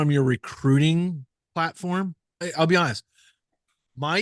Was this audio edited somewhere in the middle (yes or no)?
yes